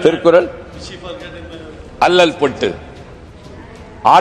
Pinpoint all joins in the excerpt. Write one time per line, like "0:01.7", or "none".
none